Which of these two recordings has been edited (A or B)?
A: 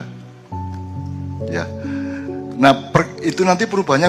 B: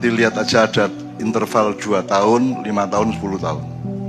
A